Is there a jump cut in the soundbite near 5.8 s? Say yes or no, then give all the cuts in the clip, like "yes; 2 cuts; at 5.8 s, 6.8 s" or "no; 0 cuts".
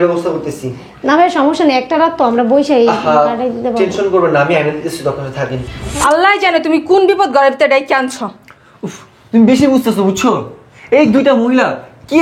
yes; 1 cut; at 5.8 s